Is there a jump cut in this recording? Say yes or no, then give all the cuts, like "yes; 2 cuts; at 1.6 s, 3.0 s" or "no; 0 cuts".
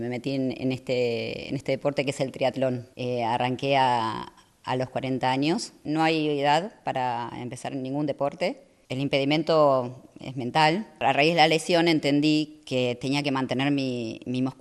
yes; 3 cuts; at 2.9 s, 5.8 s, 11.0 s